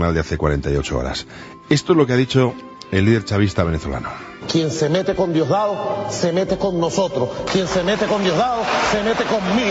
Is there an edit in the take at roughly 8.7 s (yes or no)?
no